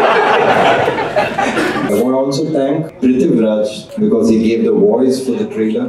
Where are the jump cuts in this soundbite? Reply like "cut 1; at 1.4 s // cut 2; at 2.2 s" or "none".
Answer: cut 1; at 1.9 s // cut 2; at 2.9 s // cut 3; at 3.8 s